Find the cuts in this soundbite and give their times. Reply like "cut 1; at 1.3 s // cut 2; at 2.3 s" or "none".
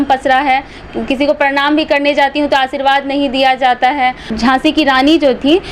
cut 1; at 4.3 s